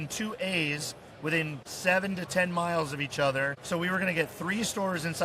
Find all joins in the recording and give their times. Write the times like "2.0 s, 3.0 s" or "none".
1.6 s, 3.6 s

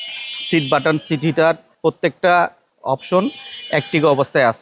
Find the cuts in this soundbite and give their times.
1.7 s, 2.7 s

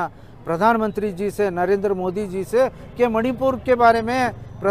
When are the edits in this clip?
none

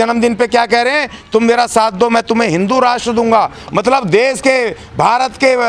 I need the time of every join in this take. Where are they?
none

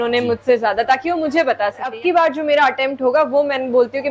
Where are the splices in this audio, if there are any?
1.9 s

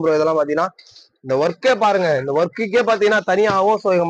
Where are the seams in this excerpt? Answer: none

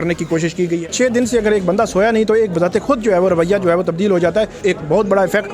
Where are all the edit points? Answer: 0.8 s, 4.6 s

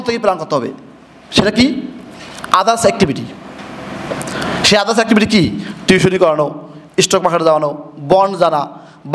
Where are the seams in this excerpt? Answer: none

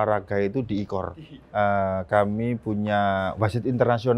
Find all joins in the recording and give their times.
1.2 s

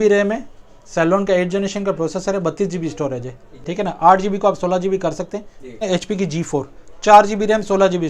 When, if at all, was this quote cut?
5.8 s

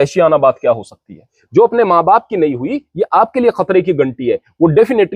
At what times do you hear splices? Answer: 1.3 s

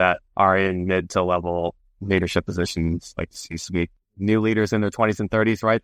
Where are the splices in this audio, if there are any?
4.1 s

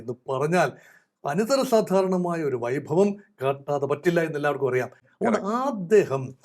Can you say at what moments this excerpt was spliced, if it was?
none

